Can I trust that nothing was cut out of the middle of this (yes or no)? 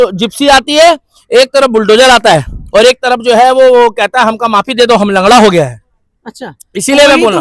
yes